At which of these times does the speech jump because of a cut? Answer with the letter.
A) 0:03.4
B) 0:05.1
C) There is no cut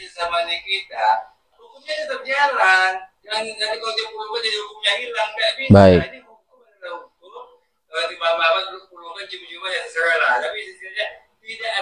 C